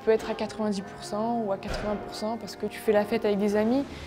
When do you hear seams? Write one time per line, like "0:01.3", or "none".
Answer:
0:02.8